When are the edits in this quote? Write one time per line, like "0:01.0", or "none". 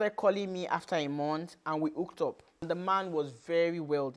0:02.6

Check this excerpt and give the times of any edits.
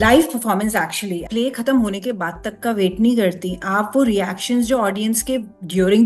0:01.2

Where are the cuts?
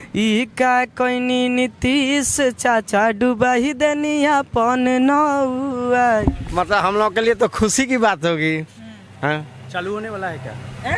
0:06.2

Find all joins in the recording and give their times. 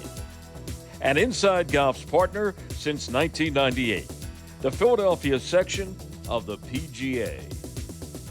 0:07.4

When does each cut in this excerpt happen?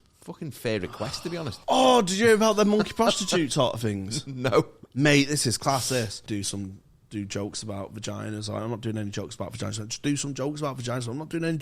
0:01.6
0:06.2

